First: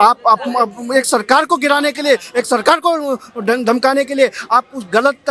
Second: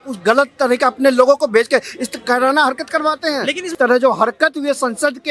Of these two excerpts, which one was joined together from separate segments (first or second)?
second